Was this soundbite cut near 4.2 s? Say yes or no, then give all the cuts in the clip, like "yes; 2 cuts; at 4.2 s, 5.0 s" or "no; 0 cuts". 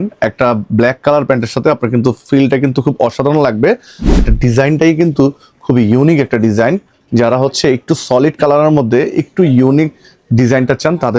yes; 1 cut; at 4.2 s